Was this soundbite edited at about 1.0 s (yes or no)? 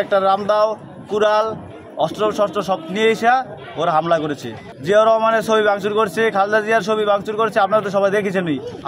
no